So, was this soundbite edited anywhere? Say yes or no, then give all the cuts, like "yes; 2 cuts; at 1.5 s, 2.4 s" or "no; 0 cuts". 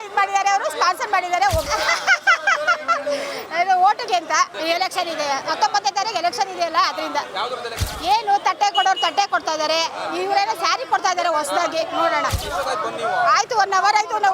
yes; 5 cuts; at 1.6 s, 3.4 s, 4.5 s, 7.9 s, 12.4 s